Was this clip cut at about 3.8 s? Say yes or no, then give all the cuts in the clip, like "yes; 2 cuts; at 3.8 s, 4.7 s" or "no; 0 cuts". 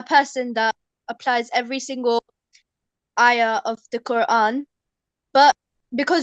no; 1 cut; at 0.9 s